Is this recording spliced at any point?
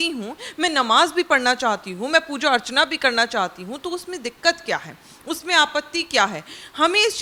no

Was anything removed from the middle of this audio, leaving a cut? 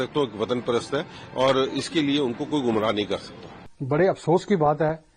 no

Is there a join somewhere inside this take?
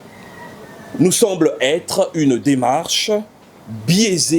no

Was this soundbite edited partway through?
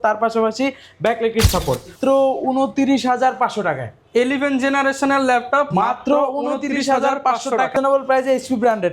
yes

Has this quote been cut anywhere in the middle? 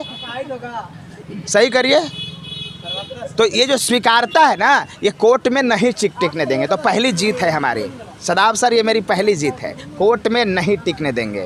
no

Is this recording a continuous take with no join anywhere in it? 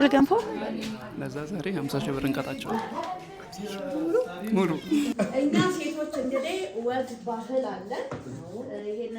no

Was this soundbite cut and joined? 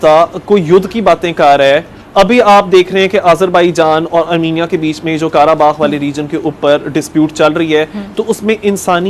no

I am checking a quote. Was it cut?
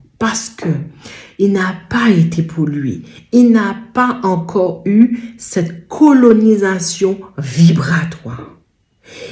no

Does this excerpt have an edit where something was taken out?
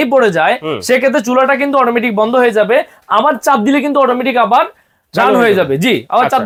no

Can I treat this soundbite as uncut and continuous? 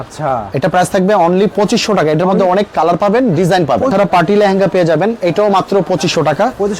no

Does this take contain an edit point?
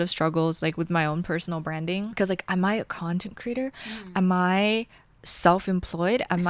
no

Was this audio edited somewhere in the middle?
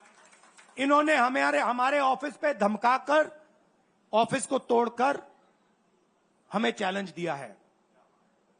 no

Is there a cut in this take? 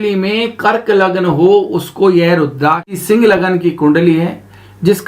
yes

